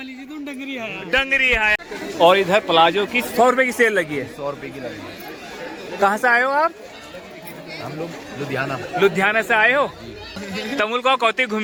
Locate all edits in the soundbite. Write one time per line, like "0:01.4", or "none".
none